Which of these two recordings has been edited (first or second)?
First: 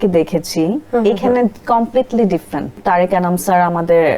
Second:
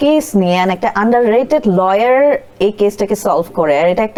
first